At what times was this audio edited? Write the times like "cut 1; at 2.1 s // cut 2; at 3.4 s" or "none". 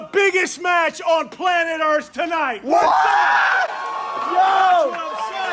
none